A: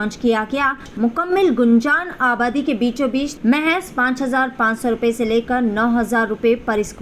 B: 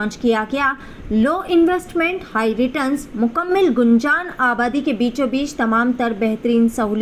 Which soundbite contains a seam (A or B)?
A